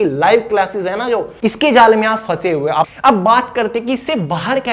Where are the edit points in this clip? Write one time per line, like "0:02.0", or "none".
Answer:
0:01.3
0:02.9